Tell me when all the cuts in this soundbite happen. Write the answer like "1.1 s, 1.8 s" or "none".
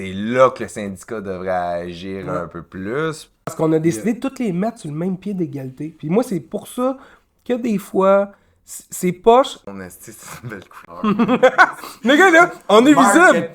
3.4 s, 9.6 s

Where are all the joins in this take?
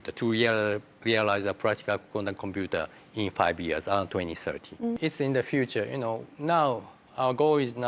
5.0 s

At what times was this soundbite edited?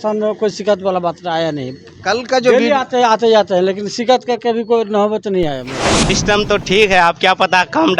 5.9 s

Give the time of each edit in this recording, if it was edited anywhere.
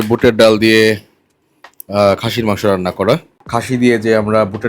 3.4 s

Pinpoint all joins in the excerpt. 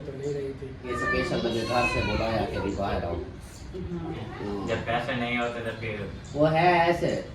0.9 s, 4.2 s

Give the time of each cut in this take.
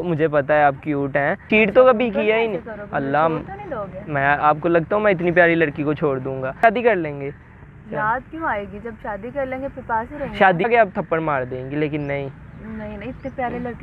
1.4 s, 6.6 s, 10.7 s

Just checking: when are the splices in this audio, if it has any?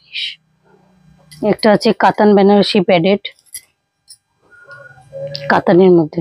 1.5 s

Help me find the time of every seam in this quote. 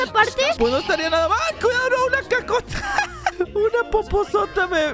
none

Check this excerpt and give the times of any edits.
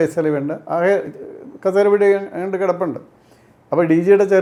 none

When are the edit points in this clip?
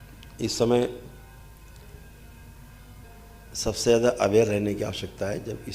3.0 s

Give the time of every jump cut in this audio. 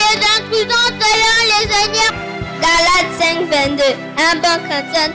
2.2 s

